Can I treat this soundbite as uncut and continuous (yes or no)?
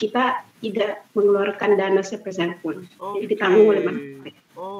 yes